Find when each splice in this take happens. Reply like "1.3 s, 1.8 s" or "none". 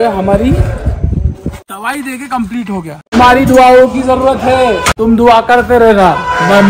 3.0 s